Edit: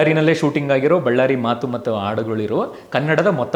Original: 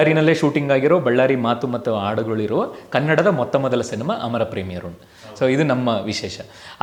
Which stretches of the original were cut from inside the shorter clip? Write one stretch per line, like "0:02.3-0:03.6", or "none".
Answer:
none

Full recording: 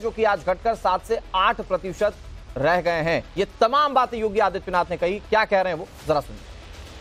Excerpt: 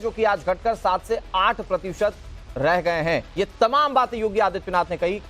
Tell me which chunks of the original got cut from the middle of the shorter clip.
none

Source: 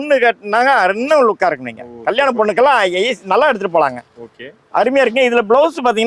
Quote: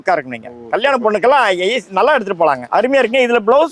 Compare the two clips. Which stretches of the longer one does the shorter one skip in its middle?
0:04.0-0:04.6

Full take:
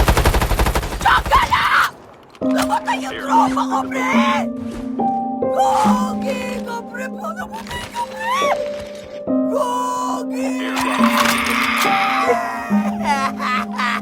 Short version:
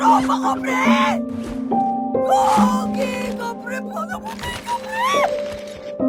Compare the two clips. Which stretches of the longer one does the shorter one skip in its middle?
none

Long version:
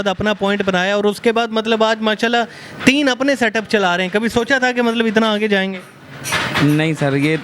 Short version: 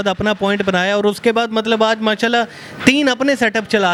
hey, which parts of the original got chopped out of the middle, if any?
none

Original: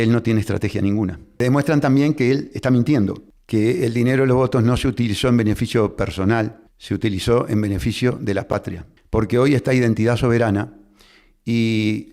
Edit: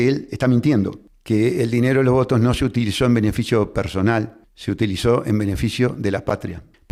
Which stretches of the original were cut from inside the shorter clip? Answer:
none

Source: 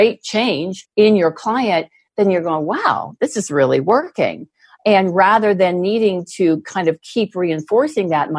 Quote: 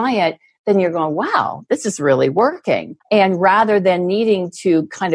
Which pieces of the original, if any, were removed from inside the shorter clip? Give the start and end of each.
0:04.4-0:04.7

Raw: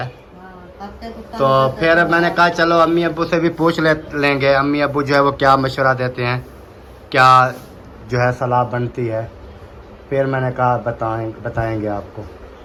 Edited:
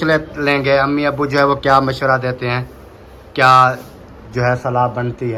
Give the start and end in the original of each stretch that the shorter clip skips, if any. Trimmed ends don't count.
none

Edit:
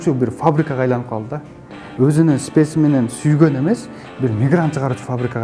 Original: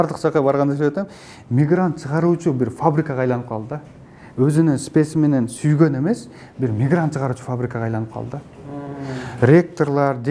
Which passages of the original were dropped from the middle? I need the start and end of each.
none

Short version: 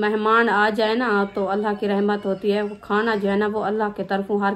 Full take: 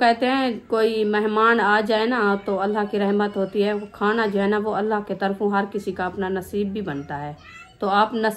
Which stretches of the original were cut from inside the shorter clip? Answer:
none

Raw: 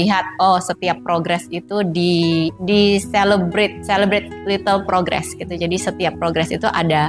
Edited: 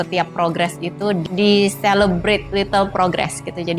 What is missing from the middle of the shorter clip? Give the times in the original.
0:01.9-0:02.5
0:03.8-0:04.4

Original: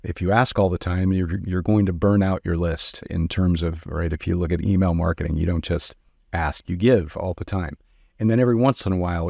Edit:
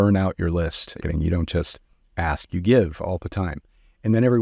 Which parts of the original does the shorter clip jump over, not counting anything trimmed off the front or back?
0:03.1-0:05.2

